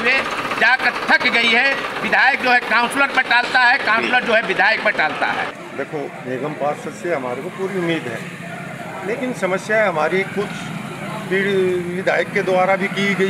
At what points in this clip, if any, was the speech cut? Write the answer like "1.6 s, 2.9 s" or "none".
none